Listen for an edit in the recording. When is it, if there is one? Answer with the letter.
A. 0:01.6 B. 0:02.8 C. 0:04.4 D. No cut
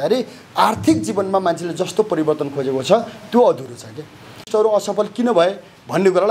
C